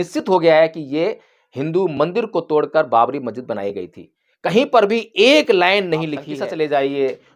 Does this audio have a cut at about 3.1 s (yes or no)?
no